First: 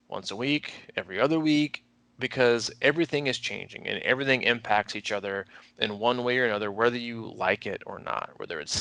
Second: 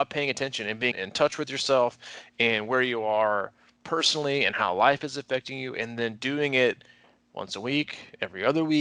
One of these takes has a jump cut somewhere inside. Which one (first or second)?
second